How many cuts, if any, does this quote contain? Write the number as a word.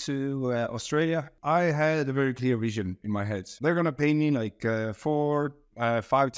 two